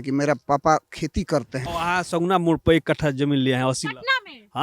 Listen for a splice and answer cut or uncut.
cut